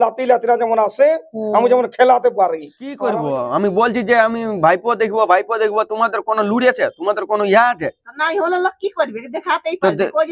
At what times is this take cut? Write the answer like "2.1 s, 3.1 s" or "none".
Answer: 3.0 s